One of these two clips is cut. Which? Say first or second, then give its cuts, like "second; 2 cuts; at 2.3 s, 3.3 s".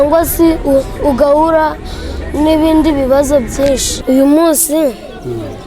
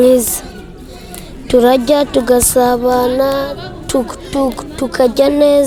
first; 1 cut; at 3.9 s